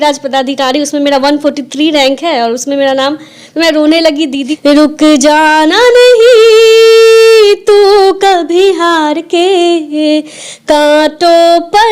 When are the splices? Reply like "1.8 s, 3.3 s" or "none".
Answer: 4.5 s